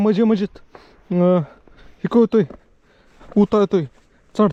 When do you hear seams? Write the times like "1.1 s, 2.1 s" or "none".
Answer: none